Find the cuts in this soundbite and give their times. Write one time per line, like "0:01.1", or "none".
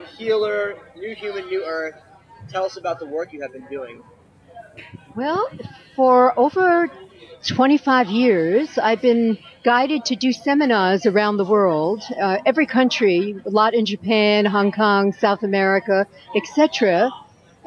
none